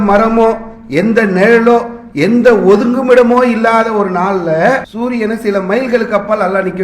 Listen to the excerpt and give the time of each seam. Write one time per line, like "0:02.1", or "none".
0:04.9